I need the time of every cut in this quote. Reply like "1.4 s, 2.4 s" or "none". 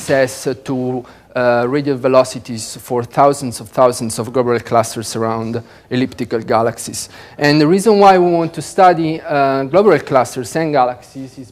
1.1 s